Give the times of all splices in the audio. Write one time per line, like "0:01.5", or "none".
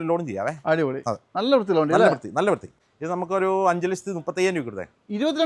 0:02.8

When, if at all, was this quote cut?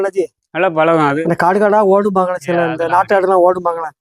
0:01.2

